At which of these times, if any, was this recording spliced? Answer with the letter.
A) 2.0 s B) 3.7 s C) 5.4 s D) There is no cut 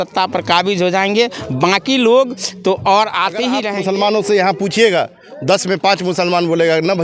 B